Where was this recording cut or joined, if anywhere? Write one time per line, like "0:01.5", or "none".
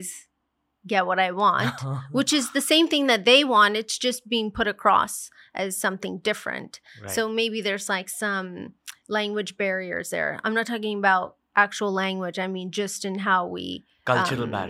none

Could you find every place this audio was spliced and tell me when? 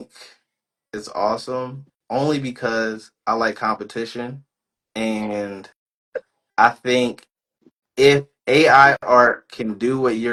none

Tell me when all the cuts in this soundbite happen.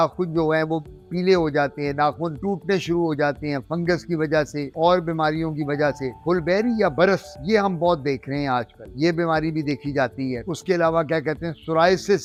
none

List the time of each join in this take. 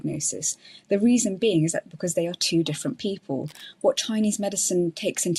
none

